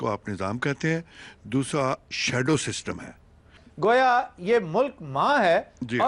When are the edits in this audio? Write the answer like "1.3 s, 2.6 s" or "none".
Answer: 3.6 s